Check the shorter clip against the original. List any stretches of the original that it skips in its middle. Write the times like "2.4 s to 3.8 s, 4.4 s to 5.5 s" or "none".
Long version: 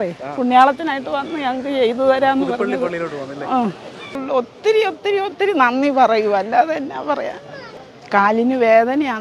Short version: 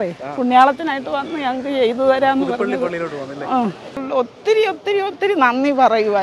3.9 s to 4.1 s